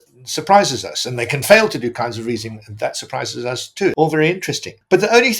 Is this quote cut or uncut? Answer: cut